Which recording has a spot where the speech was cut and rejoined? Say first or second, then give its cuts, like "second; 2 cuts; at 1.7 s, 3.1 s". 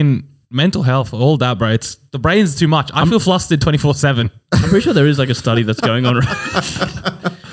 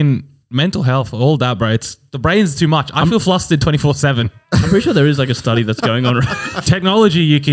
second; 1 cut; at 6.5 s